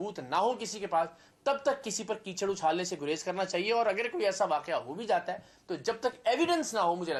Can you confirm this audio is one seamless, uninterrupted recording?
yes; 0 cuts

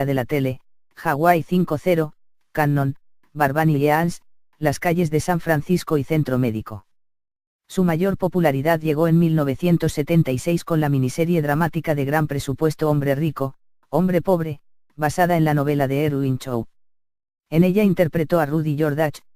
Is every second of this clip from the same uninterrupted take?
no; 1 cut; at 6.3 s

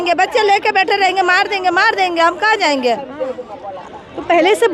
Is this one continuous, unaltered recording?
yes; 0 cuts

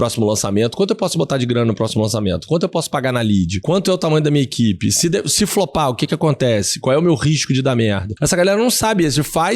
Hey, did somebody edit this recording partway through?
yes; 2 cuts; at 3.6 s, 8.1 s

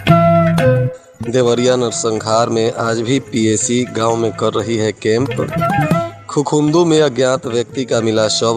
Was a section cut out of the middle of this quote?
yes; 1 cut; at 1.0 s

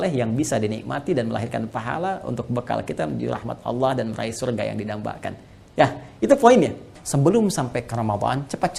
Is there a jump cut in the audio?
yes; 1 cut; at 7.0 s

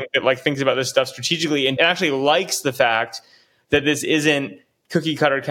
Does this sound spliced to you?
yes; 1 cut; at 1.7 s

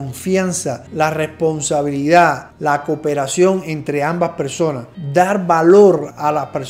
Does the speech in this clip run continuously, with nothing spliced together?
no; 1 cut; at 4.9 s

